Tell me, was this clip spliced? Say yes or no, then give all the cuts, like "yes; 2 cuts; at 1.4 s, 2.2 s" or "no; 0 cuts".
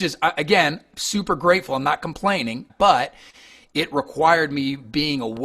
yes; 1 cut; at 2.7 s